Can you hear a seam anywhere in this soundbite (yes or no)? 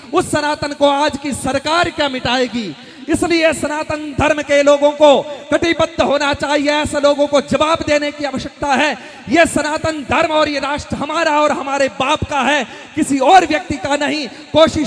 no